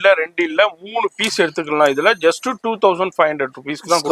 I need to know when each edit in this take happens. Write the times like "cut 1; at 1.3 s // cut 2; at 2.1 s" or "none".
none